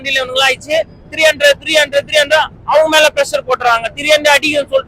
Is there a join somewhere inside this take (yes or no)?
no